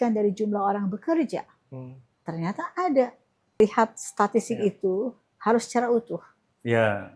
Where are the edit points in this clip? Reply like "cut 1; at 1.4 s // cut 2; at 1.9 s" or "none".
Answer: cut 1; at 3.6 s